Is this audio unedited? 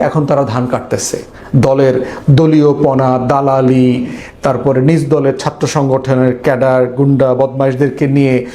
yes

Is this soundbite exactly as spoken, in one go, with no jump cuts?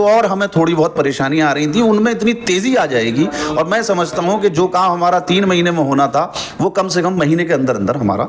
yes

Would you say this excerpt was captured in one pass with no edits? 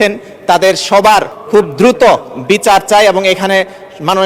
no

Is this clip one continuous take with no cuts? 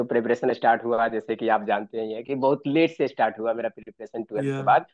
yes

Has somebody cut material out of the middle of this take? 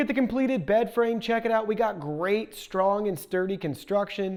no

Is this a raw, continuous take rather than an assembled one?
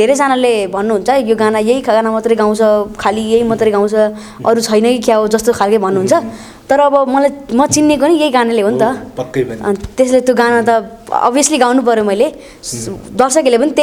yes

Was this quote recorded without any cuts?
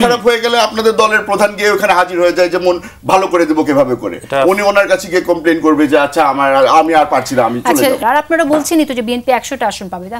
no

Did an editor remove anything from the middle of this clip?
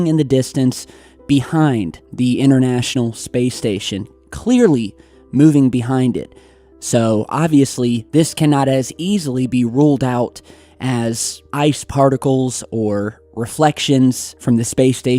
yes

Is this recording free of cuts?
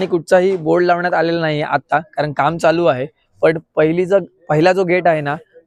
yes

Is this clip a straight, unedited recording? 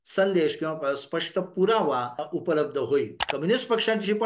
no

